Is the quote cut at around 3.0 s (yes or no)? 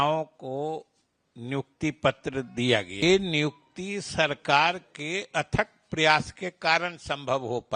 yes